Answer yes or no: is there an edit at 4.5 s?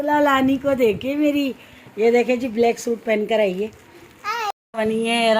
yes